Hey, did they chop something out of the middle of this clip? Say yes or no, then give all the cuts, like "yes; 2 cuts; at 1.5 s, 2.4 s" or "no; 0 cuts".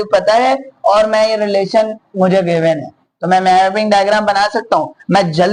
no; 0 cuts